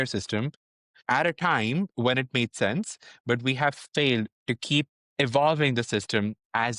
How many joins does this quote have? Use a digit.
1